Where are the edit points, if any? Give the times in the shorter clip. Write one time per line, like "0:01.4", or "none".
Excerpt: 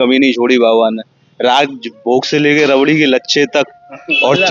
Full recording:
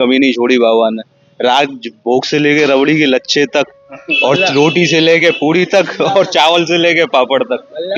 none